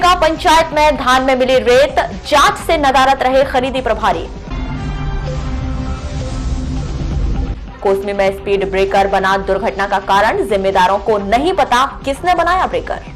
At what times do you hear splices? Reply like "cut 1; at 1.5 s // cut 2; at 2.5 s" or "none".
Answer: none